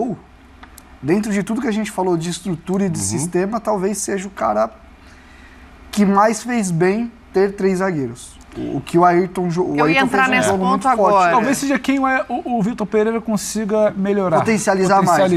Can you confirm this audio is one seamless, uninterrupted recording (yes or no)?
yes